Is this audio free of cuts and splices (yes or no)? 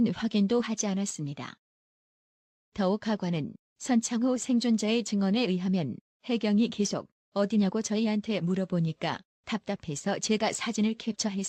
yes